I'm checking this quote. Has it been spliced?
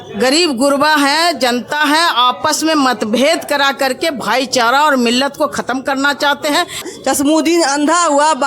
yes; 1 cut; at 6.8 s

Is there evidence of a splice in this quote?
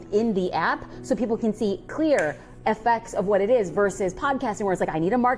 no; 0 cuts

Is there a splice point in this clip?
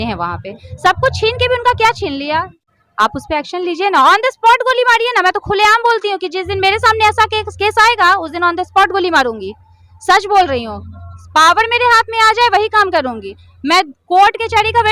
yes; 1 cut; at 2.5 s

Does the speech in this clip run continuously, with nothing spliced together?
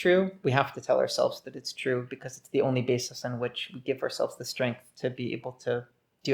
yes; 0 cuts

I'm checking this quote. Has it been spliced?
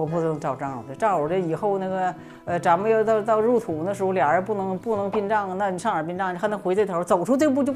no; 0 cuts

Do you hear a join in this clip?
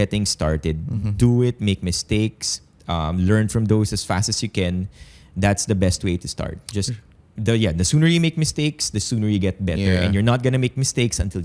no; 0 cuts

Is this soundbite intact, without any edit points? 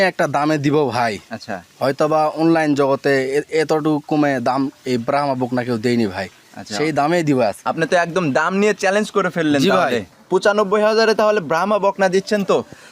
no; 2 cuts; at 7.6 s, 10.1 s

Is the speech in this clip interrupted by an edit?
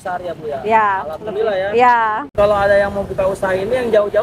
no; 0 cuts

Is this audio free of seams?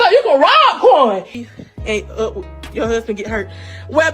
no; 1 cut; at 1.3 s

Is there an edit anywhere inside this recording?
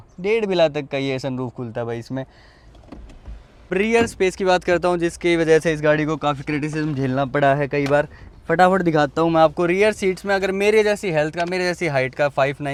no; 0 cuts

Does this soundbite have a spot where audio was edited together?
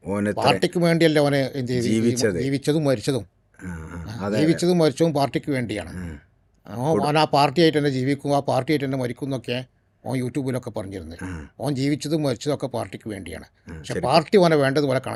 no; 0 cuts

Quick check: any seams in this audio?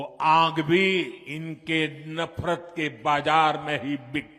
yes; 1 cut; at 1.2 s

